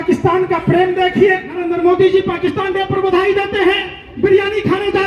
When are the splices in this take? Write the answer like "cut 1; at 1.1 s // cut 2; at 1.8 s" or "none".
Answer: cut 1; at 1.6 s